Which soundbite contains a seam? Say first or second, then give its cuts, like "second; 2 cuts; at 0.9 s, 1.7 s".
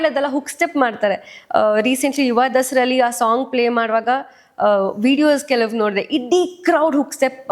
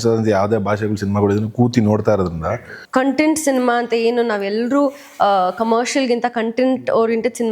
second; 1 cut; at 2.7 s